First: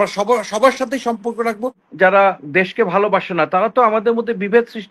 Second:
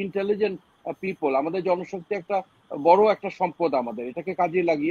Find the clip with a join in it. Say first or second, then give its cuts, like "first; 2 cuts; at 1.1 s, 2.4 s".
first; 1 cut; at 1.8 s